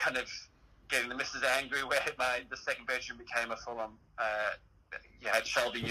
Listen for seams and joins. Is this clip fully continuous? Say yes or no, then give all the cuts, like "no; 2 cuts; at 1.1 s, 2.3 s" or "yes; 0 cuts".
yes; 0 cuts